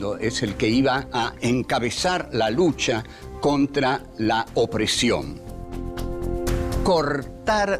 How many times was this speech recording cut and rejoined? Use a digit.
1